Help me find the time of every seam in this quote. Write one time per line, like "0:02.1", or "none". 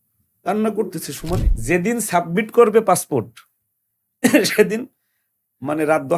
0:01.5